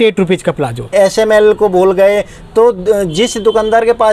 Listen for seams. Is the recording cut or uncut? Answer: cut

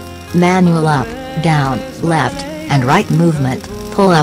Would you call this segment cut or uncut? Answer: uncut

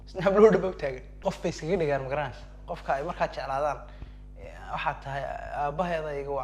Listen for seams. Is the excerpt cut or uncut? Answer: cut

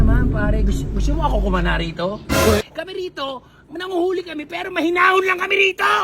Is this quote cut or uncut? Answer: cut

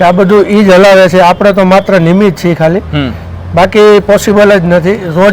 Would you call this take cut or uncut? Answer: uncut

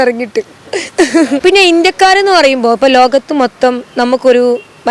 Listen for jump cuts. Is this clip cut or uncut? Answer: cut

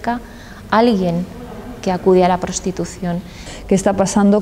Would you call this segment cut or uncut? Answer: cut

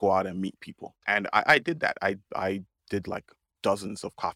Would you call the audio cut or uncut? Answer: cut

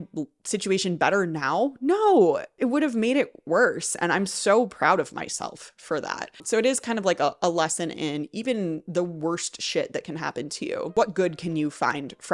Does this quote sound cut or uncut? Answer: cut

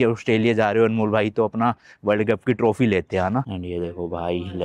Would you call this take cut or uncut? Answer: cut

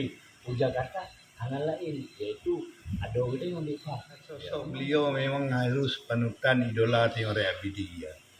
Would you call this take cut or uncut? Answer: cut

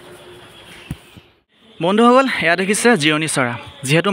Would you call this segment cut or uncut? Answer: uncut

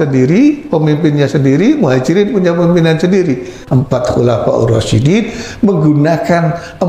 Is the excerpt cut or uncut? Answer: cut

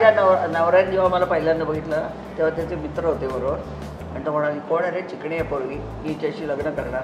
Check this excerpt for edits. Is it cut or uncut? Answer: uncut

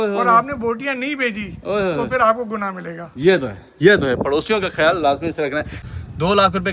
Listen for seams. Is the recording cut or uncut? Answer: cut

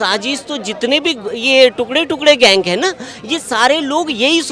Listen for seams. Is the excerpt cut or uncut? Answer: uncut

